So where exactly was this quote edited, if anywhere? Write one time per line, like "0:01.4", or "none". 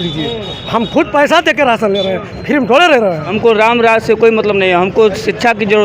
0:03.3